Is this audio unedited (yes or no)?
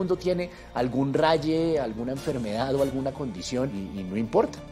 no